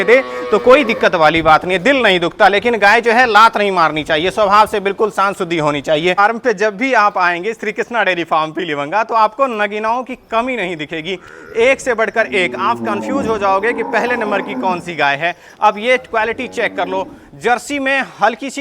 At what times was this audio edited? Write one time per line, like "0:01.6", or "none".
0:06.2